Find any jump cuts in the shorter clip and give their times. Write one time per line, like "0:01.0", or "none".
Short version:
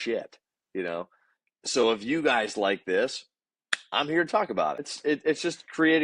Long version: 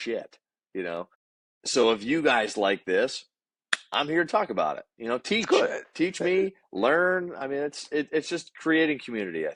0:04.9